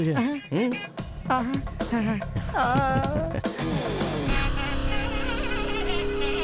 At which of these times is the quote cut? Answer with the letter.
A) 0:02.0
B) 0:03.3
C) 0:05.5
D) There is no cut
D